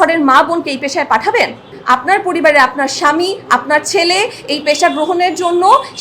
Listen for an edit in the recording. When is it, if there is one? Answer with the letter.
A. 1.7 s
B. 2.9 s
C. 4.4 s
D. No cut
A